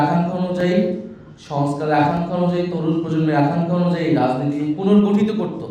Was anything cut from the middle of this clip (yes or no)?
no